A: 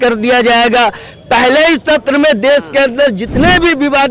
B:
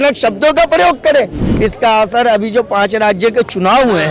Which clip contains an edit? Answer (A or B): B